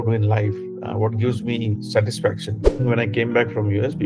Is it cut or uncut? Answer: cut